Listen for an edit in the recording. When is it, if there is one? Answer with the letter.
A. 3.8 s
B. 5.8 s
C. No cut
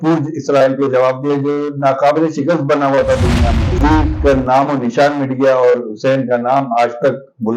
A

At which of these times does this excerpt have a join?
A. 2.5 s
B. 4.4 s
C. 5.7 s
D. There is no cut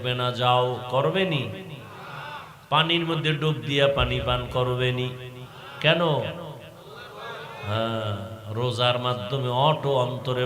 D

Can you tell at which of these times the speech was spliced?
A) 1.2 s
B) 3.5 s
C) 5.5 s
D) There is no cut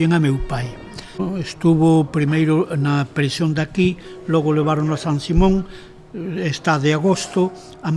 A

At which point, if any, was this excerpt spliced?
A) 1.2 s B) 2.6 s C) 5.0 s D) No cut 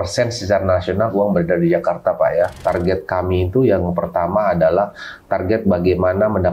B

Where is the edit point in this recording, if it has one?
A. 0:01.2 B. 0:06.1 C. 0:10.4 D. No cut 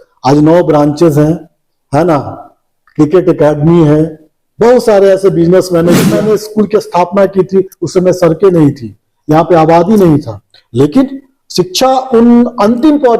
B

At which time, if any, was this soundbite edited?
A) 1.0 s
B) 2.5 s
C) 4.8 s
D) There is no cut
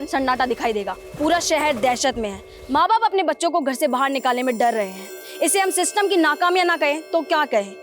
A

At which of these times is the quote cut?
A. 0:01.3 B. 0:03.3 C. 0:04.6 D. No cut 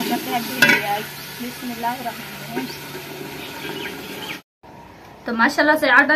C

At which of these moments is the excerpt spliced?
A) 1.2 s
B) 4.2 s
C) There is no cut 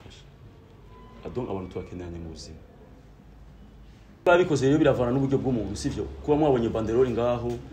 B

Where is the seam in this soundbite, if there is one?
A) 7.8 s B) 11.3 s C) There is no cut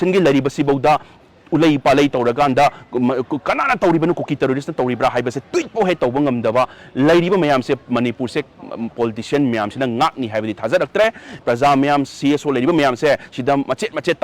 B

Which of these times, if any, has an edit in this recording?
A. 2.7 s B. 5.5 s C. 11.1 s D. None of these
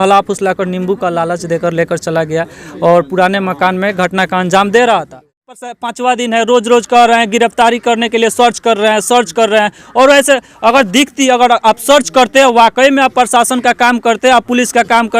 B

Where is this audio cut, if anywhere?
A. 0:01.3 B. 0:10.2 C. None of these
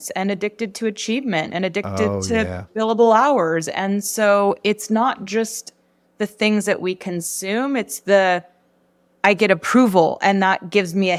C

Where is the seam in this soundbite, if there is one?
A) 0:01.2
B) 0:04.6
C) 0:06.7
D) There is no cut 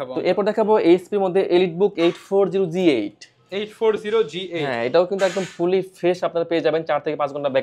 D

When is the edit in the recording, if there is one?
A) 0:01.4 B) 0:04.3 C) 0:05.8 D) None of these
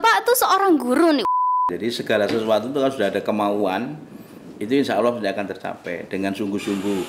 A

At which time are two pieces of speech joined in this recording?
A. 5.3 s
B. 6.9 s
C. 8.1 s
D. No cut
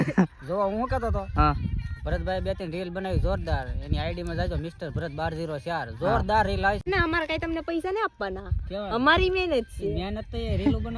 B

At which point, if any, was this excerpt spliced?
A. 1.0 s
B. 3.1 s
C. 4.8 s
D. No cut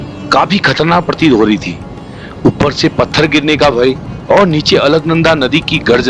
D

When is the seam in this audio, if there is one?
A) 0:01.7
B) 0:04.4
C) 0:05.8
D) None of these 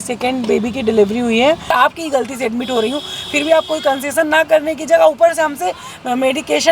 A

